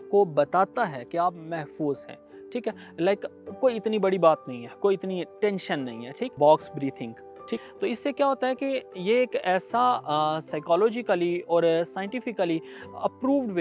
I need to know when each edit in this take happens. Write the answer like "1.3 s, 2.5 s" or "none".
6.3 s, 7.6 s